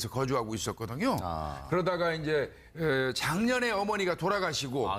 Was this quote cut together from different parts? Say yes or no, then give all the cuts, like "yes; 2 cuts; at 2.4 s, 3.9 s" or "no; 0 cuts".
no; 0 cuts